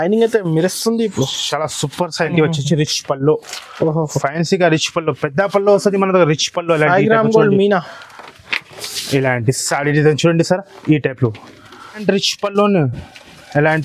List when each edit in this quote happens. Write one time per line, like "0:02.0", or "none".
0:02.3
0:12.0

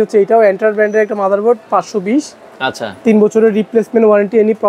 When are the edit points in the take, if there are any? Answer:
none

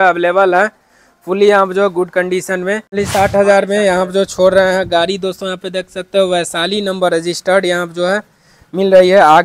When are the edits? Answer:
0:02.9

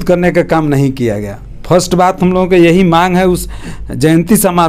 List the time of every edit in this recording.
none

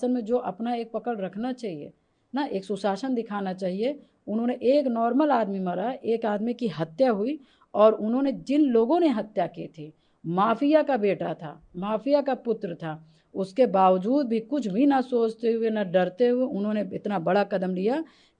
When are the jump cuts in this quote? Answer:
none

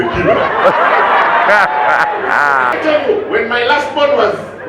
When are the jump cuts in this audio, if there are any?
0:02.7

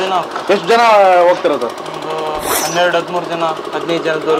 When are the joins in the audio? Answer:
none

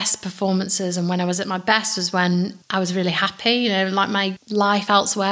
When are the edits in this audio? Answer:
0:02.6
0:04.4

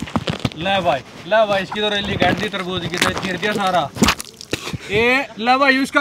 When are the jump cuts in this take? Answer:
0:04.8

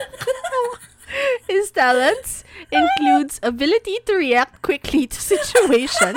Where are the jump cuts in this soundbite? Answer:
none

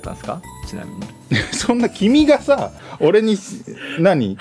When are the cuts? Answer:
none

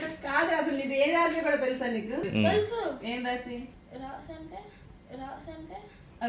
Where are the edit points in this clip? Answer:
0:02.2
0:03.7

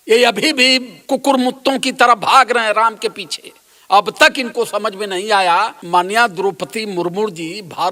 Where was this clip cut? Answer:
0:00.9
0:05.8

